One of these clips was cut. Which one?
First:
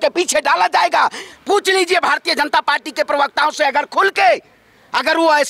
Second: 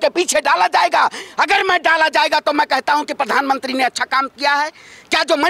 first; 1 cut; at 1.2 s

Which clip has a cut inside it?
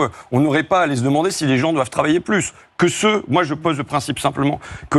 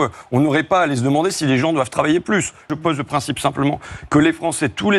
second; 1 cut; at 2.7 s

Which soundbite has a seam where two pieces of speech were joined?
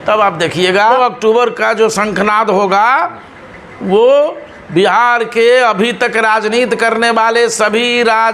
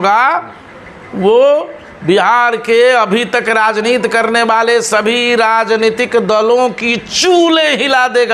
first; 1 cut; at 1.0 s

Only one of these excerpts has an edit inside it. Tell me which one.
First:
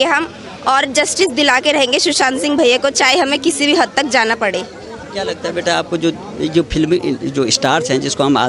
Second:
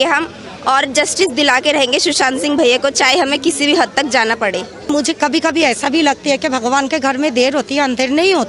second; 1 cut; at 4.9 s

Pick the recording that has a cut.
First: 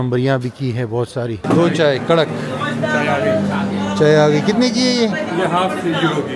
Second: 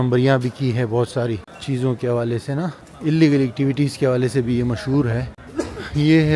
first; 1 cut; at 1.4 s

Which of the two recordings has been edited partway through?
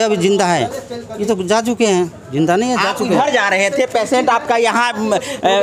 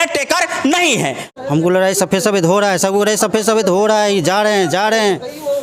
second; 1 cut; at 1.2 s

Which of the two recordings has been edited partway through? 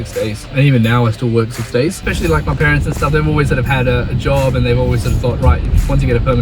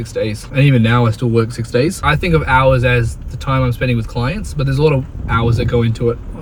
first; 1 cut; at 2.0 s

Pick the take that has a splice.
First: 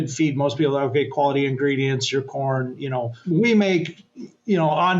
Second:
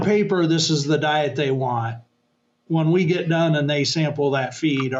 first; 1 cut; at 3.2 s

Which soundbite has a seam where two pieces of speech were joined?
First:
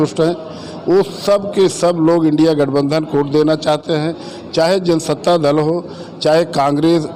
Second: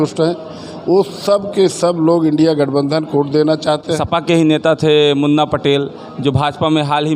second; 1 cut; at 4.0 s

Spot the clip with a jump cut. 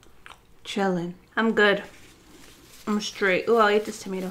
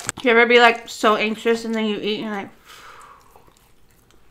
first; 1 cut; at 1.2 s

